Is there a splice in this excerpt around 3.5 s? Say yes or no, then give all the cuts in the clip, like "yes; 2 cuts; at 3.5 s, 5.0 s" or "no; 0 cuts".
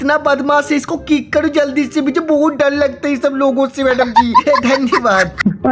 no; 0 cuts